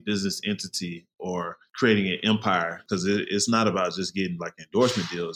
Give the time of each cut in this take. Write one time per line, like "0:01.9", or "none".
0:01.6
0:02.8